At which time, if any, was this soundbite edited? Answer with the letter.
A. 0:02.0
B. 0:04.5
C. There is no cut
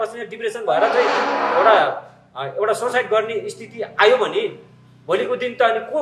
C